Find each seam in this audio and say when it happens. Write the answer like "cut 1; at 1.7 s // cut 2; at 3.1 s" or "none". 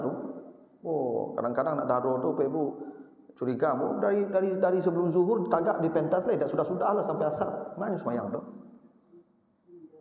none